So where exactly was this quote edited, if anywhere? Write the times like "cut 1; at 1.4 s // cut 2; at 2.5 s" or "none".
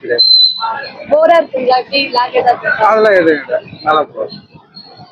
none